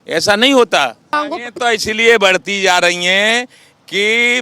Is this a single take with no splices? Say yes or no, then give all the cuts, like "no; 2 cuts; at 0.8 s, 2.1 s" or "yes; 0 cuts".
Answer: no; 1 cut; at 1.1 s